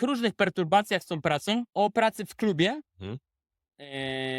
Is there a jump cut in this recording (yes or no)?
yes